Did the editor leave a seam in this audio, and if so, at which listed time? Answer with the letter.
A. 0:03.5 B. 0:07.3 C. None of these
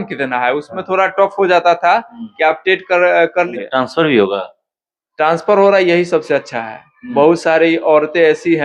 A